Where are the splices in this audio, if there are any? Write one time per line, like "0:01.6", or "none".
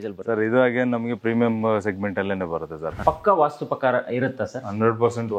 0:02.8